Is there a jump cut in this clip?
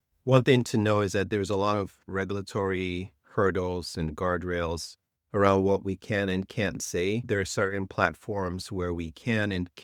no; 0 cuts

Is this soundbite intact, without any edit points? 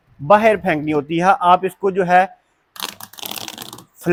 yes; 0 cuts

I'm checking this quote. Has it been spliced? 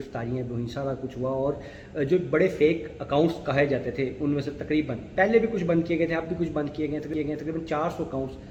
no; 0 cuts

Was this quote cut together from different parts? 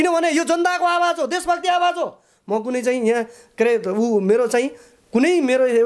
no; 0 cuts

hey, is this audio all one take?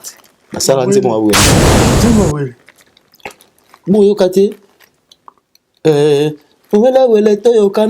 no; 1 cut; at 1.8 s

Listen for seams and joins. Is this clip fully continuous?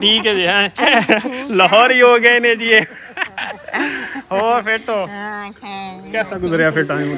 yes; 0 cuts

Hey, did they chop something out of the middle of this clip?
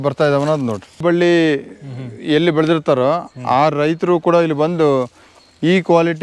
yes; 1 cut; at 1.0 s

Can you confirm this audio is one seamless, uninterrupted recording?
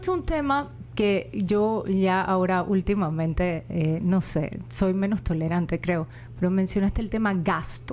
yes; 0 cuts

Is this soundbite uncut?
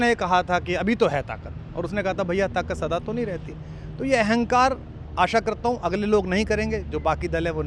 yes; 0 cuts

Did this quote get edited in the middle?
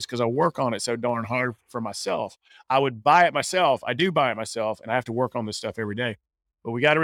no; 0 cuts

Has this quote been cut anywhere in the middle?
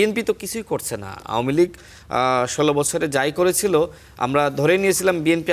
no; 0 cuts

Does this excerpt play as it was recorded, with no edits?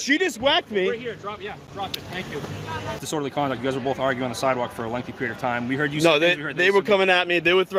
no; 1 cut; at 3.0 s

